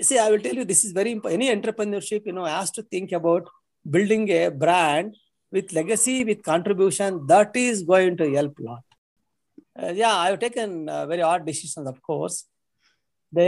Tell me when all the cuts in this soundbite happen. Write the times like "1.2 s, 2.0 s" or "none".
9.3 s